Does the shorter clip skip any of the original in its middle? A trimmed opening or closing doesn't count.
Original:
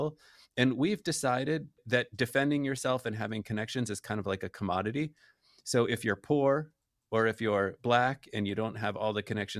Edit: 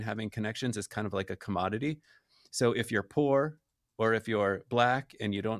no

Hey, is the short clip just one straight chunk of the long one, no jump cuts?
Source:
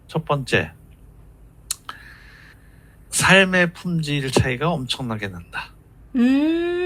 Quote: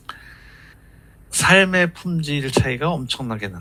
yes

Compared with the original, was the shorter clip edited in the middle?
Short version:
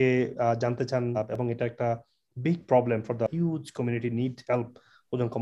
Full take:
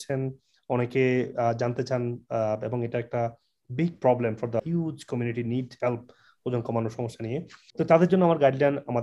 yes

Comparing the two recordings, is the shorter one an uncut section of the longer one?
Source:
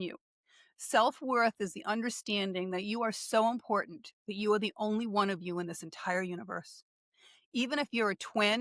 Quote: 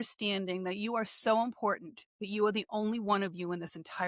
yes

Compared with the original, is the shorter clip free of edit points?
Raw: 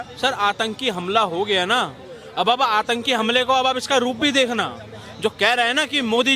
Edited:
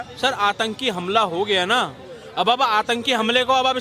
yes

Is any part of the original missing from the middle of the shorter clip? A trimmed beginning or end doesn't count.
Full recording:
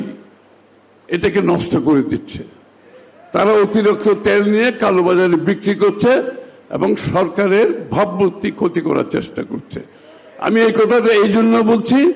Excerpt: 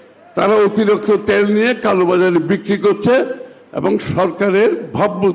no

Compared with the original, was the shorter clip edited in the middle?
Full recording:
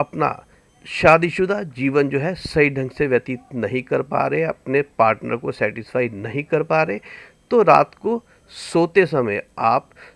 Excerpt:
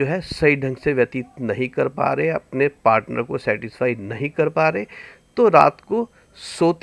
no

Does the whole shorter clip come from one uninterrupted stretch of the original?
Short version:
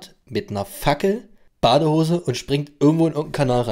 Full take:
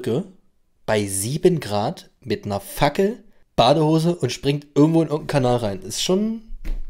yes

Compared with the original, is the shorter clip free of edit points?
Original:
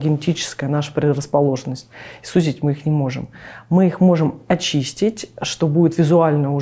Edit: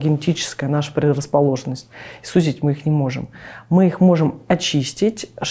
yes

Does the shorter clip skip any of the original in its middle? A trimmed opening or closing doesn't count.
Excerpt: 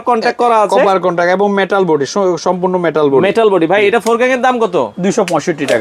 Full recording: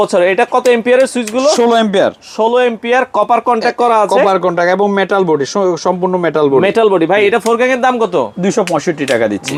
no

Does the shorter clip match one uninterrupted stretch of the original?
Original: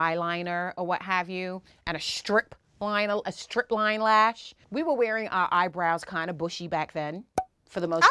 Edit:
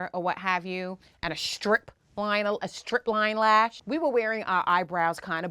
no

